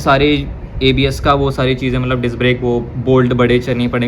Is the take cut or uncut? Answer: uncut